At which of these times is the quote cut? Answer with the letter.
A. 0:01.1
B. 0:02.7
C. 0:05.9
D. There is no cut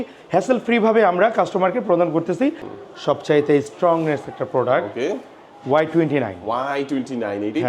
B